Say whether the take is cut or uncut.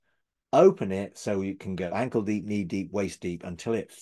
cut